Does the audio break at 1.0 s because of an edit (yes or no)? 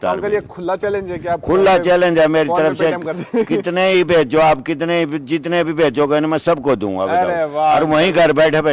no